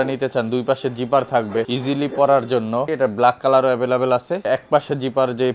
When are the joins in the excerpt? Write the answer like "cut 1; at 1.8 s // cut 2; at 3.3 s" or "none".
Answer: cut 1; at 1.7 s // cut 2; at 2.8 s // cut 3; at 4.4 s